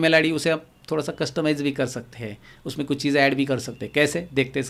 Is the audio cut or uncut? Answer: uncut